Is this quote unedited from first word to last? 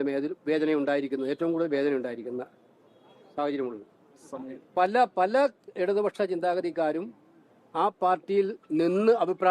yes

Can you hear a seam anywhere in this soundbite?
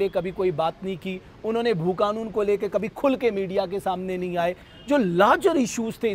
no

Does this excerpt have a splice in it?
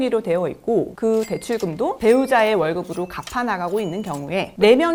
no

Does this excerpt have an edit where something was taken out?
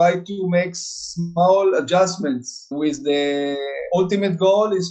yes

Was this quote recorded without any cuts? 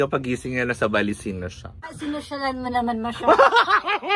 no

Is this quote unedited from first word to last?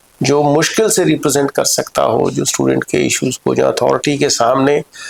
yes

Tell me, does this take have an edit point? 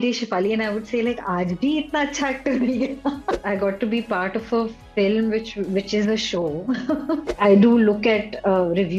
yes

